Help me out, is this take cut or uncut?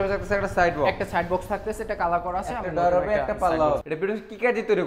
cut